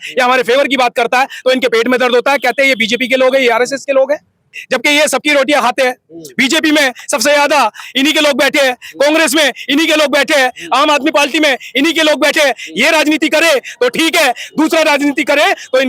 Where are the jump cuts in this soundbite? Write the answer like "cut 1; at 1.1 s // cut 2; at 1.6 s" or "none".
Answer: cut 1; at 4.6 s

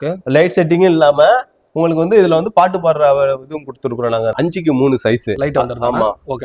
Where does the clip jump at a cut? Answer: cut 1; at 4.3 s // cut 2; at 5.3 s

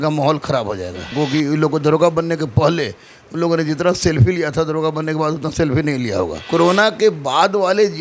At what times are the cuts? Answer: cut 1; at 1.1 s // cut 2; at 6.4 s

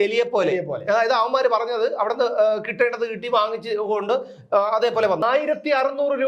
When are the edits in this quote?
cut 1; at 5.2 s

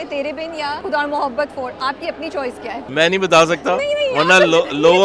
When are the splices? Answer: cut 1; at 0.8 s // cut 2; at 2.8 s

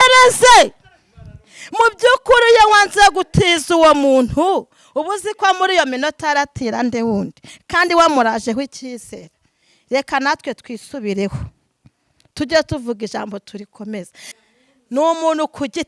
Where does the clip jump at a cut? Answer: cut 1; at 14.4 s

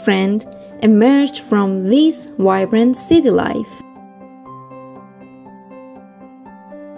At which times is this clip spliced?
none

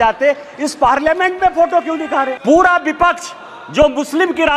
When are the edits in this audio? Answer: cut 1; at 2.4 s

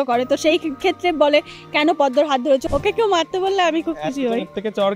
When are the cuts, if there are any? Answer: cut 1; at 2.6 s

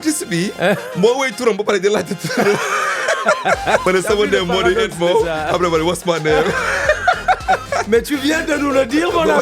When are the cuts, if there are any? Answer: cut 1; at 3.8 s // cut 2; at 7.6 s

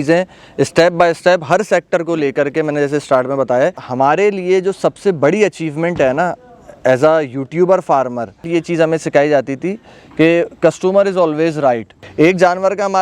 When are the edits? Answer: cut 1; at 3.8 s // cut 2; at 8.4 s // cut 3; at 12.0 s

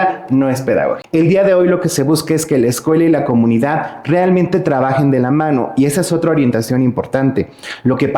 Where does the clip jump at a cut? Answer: cut 1; at 1.0 s

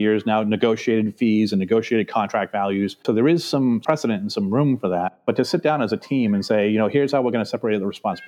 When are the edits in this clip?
none

